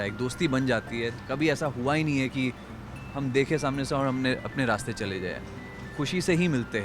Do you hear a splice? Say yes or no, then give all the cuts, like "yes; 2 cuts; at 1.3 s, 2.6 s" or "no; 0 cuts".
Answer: yes; 1 cut; at 1.1 s